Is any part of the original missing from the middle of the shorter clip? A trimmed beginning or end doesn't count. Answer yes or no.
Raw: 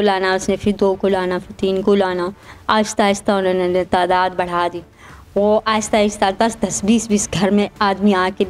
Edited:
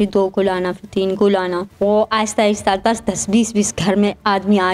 yes